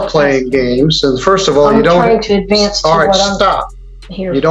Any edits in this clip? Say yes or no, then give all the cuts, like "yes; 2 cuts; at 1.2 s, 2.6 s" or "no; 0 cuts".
no; 0 cuts